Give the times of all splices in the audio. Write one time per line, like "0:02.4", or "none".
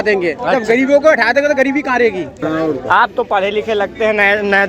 0:02.4